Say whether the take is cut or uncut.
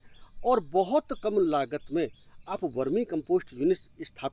uncut